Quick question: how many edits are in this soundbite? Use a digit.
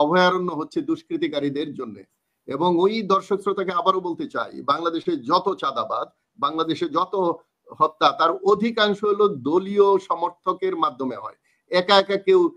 0